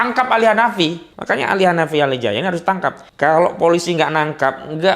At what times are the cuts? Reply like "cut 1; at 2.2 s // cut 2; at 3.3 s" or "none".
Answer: cut 1; at 1.1 s // cut 2; at 3.0 s